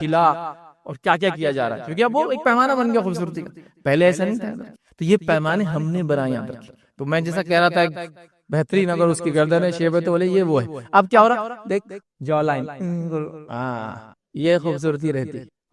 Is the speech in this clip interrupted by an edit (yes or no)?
no